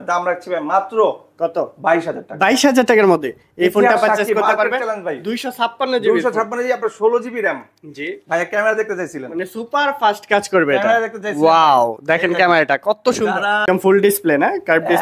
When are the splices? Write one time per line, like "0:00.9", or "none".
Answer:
0:13.6

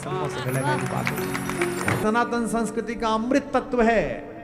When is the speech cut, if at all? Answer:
0:02.0

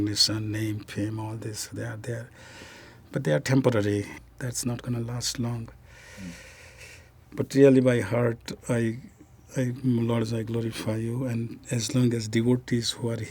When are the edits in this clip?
0:04.1

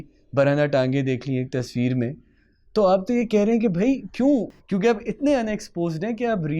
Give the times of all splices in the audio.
0:04.6

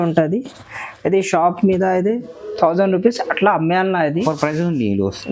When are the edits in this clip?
0:04.2

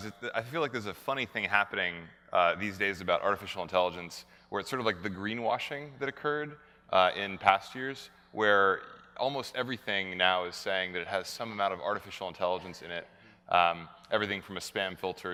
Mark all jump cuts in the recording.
none

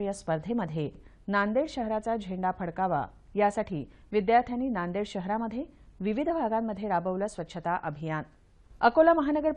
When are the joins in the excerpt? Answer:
0:01.0

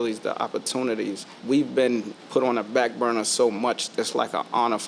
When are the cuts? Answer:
0:01.3
0:02.2
0:03.8

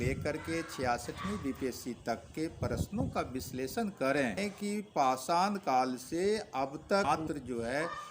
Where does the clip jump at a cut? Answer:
0:04.4
0:07.1

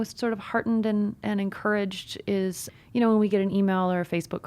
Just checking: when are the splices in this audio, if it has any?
0:02.6

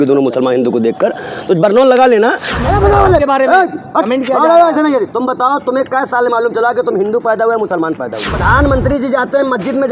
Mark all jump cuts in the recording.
0:02.6
0:08.3

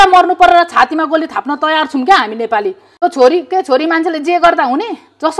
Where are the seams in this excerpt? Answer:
0:02.8

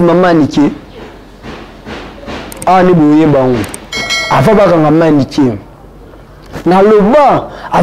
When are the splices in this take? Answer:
0:04.1

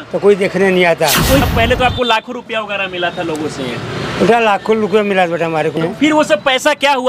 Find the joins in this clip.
0:01.4
0:05.8

